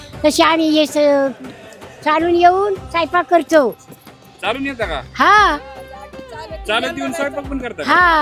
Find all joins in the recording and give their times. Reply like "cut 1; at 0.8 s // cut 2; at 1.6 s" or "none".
none